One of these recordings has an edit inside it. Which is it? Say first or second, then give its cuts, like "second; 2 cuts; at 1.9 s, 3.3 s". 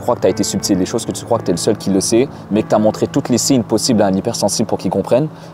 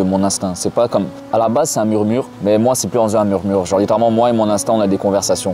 second; 2 cuts; at 1.2 s, 2.3 s